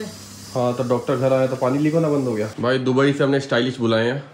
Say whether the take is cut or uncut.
cut